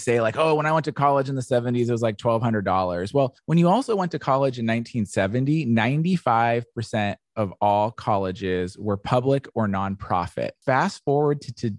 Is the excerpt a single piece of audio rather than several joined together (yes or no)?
no